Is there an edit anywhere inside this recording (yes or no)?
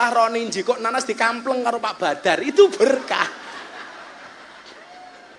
no